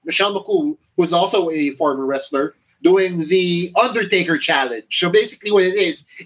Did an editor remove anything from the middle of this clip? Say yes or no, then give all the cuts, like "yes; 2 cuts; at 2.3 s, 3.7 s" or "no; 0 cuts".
no; 0 cuts